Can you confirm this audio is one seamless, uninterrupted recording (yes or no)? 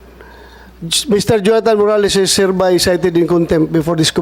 yes